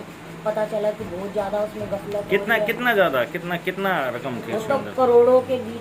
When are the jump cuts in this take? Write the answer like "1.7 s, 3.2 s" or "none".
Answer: none